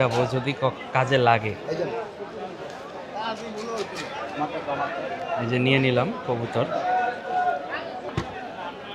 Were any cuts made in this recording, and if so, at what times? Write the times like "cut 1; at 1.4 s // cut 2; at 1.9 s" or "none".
none